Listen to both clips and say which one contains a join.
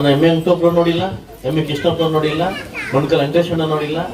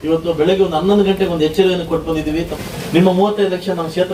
second; 1 cut; at 2.5 s

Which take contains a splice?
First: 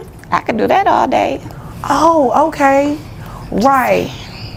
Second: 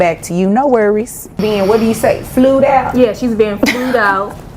second; 1 cut; at 1.4 s

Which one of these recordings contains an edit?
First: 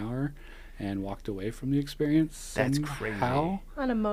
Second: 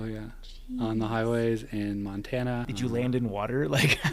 second; 1 cut; at 2.7 s

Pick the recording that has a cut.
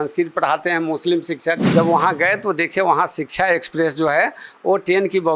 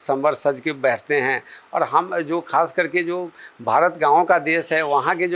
first; 1 cut; at 1.6 s

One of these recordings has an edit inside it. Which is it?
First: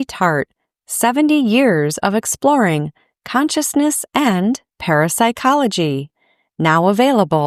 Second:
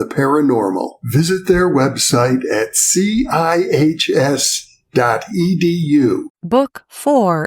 second; 1 cut; at 6.3 s

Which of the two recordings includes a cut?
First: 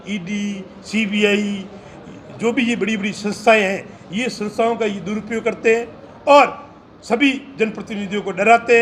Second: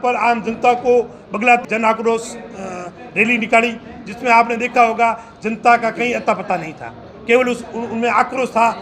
second; 1 cut; at 1.6 s

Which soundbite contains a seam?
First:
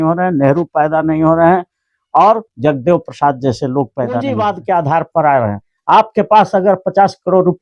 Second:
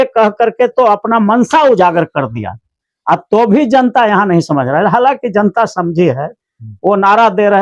first; 1 cut; at 4.3 s

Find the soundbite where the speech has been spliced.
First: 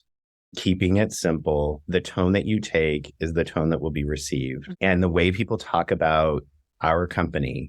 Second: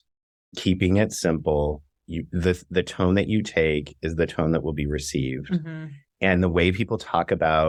first; 2 cuts; at 1.8 s, 4.6 s

